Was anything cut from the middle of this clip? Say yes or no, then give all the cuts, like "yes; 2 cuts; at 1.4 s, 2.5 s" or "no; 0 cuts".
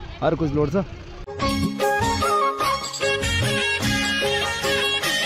yes; 1 cut; at 1.3 s